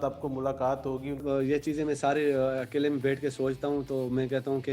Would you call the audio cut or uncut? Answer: cut